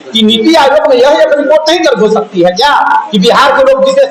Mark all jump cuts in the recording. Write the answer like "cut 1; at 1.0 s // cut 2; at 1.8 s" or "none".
none